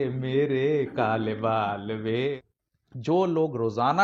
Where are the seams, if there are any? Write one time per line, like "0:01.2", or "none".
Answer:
0:02.4